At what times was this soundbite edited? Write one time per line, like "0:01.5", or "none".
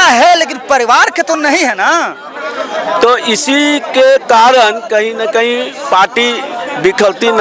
none

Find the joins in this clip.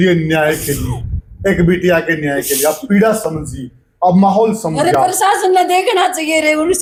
none

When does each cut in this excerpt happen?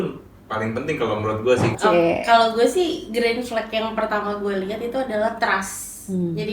0:01.7

